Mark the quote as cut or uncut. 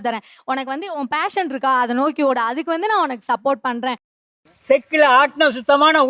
uncut